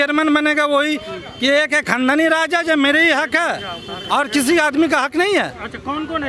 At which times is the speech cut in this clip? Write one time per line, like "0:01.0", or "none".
none